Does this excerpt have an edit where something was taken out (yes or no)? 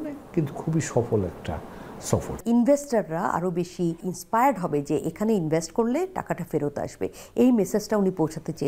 yes